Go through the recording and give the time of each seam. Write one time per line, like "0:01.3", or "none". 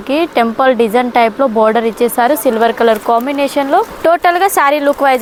none